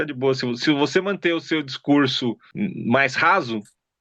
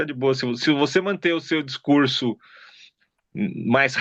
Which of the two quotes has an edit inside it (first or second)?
first